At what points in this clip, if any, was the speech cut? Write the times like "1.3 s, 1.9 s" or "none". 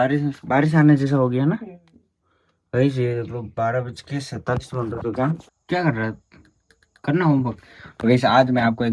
5.6 s